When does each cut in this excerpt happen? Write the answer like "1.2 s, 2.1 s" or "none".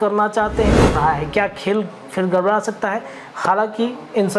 0.9 s